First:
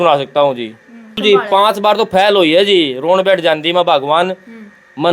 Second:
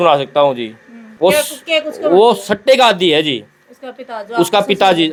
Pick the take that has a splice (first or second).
first